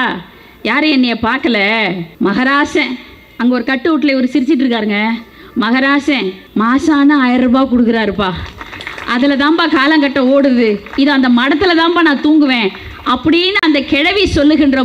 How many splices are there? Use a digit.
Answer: 2